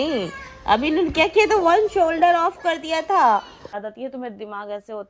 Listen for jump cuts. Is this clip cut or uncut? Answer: cut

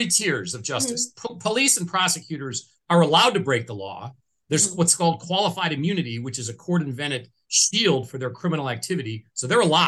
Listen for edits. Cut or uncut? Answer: uncut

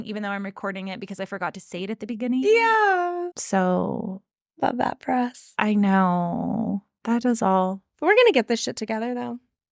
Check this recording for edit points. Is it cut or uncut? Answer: cut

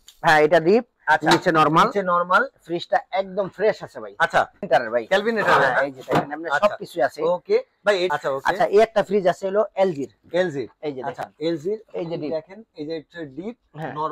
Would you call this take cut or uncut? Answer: cut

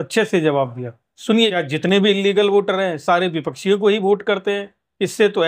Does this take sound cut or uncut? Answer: cut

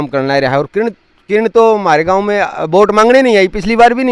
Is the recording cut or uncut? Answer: uncut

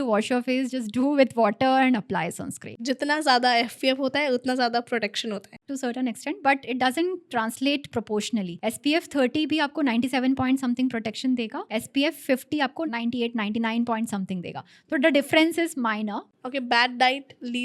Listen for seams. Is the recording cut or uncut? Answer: cut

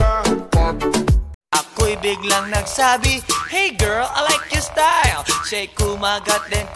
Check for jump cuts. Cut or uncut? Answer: cut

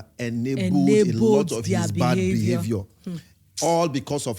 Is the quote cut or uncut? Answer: uncut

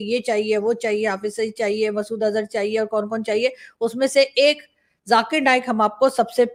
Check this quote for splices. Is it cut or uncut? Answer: uncut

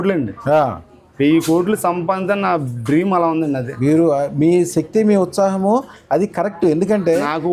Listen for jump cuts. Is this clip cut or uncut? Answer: uncut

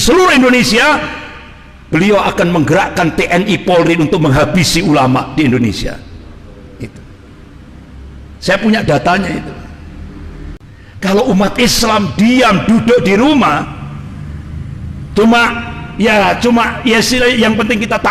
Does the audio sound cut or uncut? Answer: cut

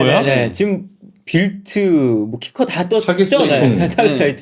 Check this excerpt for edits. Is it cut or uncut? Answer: uncut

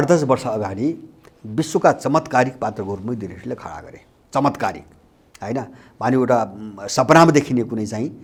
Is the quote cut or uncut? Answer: uncut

